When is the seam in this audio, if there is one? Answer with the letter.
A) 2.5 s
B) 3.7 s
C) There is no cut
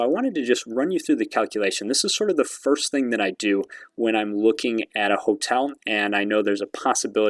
C